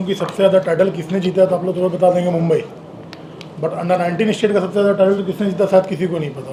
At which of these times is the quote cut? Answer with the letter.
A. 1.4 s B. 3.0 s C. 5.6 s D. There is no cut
D